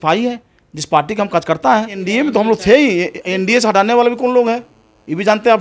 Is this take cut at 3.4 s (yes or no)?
no